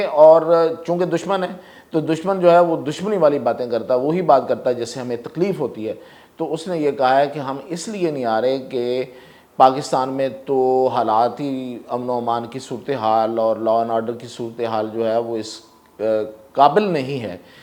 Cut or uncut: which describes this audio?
uncut